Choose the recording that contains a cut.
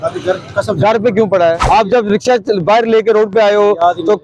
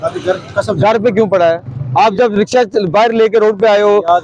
first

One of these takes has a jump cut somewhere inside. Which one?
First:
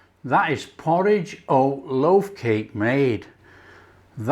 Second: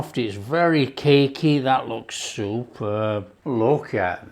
second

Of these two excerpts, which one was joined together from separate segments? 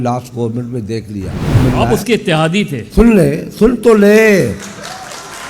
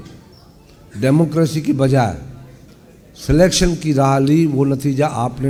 first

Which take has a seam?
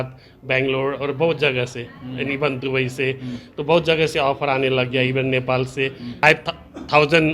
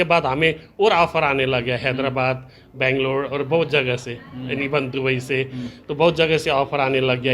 first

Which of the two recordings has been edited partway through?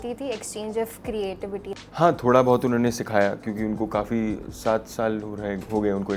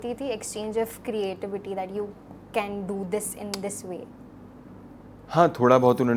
first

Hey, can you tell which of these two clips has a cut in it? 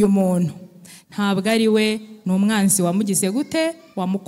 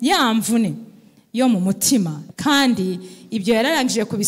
second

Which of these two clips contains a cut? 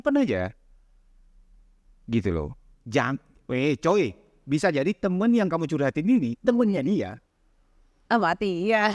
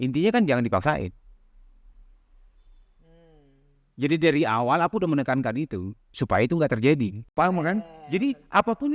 second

